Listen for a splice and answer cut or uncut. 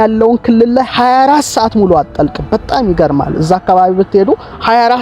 uncut